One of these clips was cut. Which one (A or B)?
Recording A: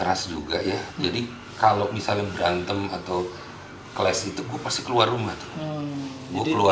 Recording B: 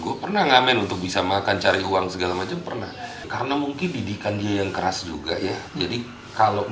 B